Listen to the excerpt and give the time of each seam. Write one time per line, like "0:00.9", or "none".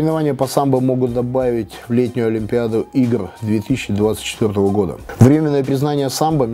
none